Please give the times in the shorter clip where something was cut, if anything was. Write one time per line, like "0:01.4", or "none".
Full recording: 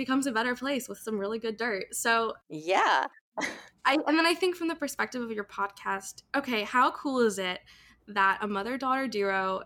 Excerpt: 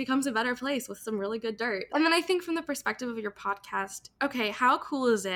0:01.9